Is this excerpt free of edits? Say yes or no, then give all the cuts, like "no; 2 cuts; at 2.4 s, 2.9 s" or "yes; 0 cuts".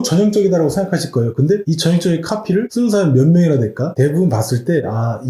no; 1 cut; at 3.9 s